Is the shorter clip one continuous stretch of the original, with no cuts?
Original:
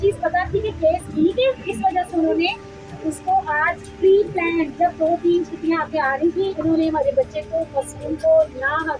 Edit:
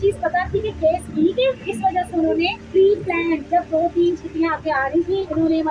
no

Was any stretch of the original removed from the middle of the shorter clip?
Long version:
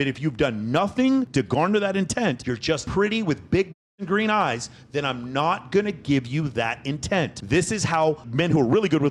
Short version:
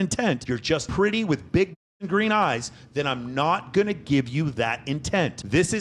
no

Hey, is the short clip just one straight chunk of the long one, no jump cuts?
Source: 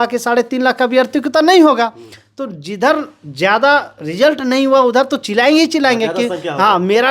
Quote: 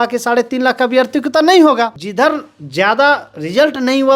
no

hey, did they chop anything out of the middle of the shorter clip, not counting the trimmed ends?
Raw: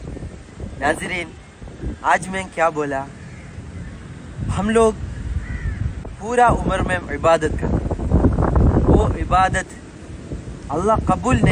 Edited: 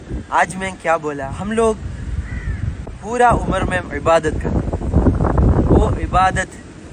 yes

